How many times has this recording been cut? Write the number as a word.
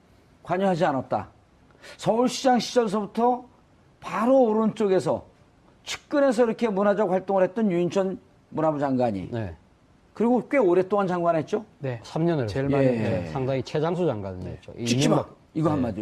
zero